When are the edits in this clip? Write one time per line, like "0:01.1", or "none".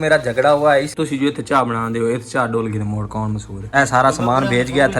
0:00.9
0:03.7